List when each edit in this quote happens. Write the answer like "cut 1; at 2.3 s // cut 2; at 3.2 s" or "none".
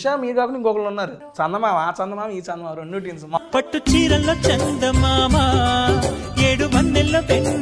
cut 1; at 1.2 s // cut 2; at 3.4 s